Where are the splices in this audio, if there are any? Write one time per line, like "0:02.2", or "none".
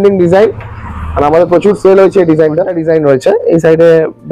0:02.8